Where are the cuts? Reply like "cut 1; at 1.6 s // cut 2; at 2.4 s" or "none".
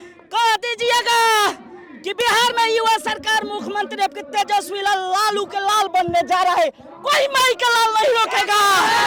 none